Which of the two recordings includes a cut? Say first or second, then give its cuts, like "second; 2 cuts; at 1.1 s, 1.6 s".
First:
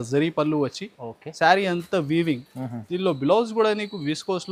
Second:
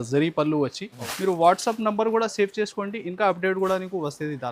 second; 1 cut; at 1.1 s